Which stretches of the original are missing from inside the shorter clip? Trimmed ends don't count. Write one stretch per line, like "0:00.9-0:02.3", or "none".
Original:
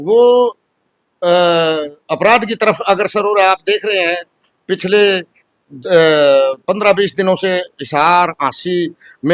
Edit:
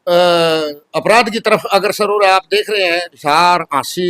0:04.3-0:07.8